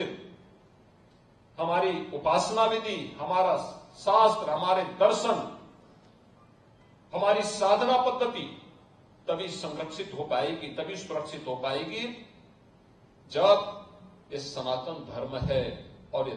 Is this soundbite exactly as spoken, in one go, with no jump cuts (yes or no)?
yes